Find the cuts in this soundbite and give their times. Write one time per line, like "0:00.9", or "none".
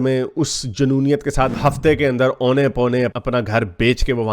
0:01.5